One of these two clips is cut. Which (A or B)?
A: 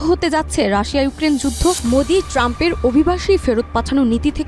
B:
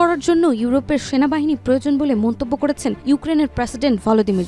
A